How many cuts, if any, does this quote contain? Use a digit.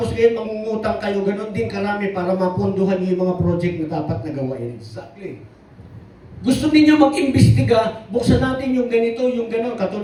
0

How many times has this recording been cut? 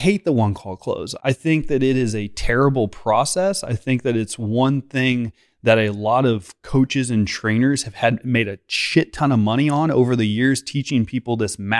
1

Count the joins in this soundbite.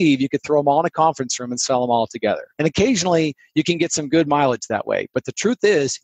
1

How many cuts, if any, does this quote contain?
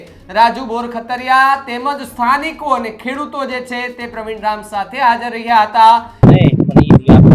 1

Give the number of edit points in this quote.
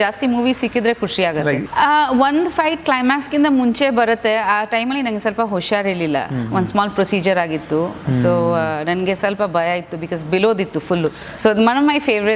2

